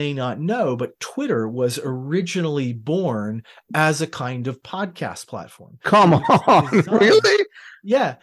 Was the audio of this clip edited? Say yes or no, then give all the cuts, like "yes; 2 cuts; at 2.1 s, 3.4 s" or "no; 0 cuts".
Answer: no; 0 cuts